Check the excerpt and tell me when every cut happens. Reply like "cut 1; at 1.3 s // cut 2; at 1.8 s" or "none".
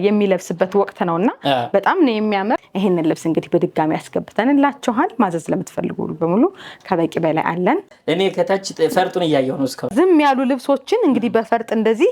cut 1; at 2.6 s // cut 2; at 7.9 s // cut 3; at 9.9 s